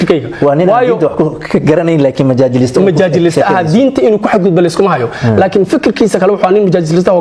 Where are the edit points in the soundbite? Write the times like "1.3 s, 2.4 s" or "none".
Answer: none